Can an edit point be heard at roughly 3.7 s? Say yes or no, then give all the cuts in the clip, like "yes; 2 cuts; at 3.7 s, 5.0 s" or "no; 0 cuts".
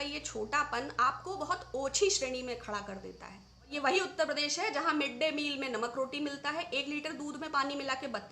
yes; 1 cut; at 3.7 s